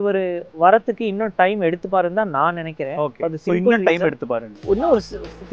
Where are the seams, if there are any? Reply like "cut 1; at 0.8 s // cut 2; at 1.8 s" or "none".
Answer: none